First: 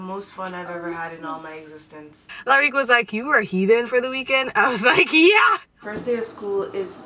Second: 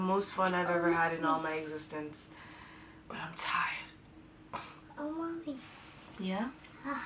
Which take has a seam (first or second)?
first